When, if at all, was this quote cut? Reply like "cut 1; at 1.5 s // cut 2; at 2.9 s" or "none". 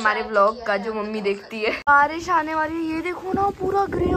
cut 1; at 1.8 s